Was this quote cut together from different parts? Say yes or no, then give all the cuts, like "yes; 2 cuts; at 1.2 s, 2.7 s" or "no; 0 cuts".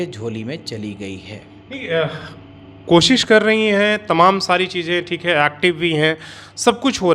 no; 0 cuts